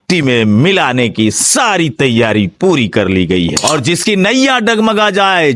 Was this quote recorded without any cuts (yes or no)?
no